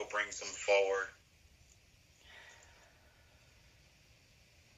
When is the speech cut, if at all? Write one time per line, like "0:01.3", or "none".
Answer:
0:02.6